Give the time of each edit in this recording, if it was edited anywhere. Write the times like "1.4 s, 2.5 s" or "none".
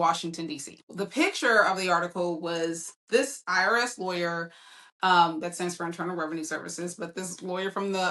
1.0 s